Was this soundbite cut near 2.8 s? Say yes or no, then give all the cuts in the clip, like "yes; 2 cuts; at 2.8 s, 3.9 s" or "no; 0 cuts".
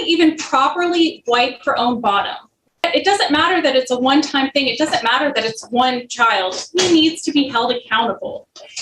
yes; 1 cut; at 2.8 s